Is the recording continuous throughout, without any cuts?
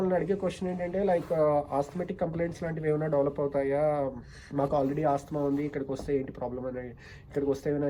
yes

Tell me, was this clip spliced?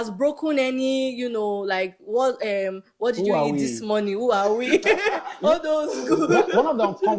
no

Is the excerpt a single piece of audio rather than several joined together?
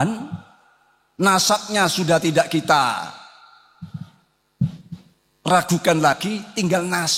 yes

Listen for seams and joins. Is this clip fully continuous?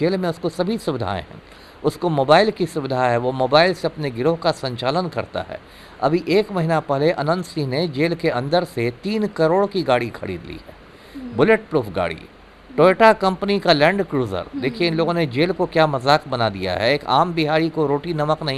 yes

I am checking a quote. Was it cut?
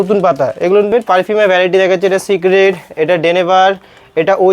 yes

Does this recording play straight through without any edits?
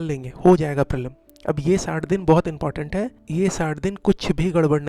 yes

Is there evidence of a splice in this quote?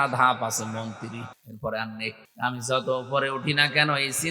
yes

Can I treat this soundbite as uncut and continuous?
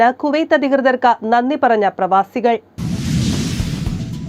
no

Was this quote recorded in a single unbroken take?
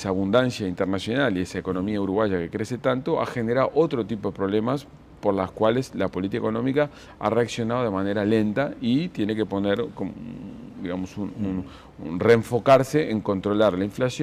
yes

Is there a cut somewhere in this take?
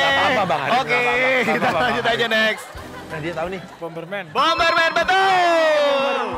no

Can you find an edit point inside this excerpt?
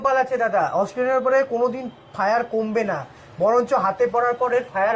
no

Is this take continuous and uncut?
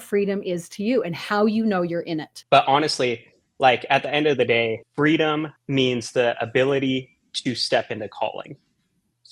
no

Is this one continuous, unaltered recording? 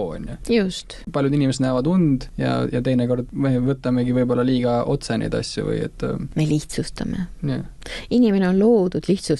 no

